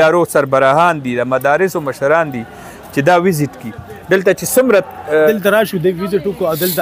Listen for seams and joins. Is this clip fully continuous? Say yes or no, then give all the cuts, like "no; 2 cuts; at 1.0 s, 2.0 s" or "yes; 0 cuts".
no; 1 cut; at 5.3 s